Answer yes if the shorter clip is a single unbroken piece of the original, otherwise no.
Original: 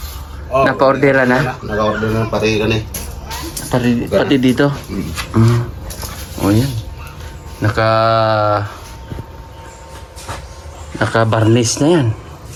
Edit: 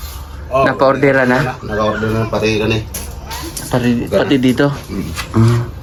yes